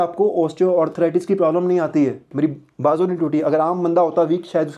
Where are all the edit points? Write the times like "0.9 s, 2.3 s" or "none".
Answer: 2.2 s